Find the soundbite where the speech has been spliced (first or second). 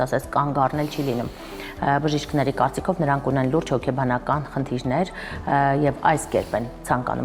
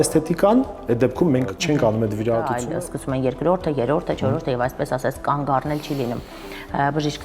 second